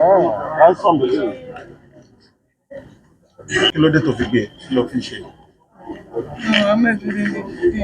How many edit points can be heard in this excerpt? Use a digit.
1